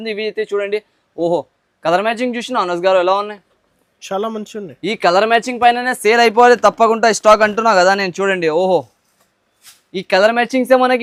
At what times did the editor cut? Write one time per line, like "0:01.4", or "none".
none